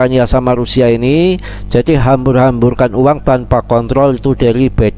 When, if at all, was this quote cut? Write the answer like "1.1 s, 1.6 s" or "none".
none